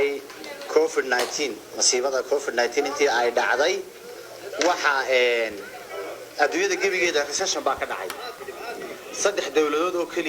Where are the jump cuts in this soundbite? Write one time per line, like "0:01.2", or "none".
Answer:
none